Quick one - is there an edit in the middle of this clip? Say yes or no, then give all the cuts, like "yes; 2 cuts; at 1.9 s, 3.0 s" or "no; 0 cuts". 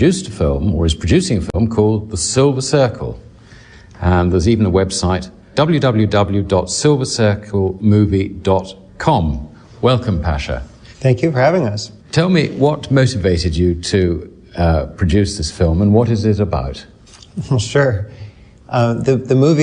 yes; 1 cut; at 17.3 s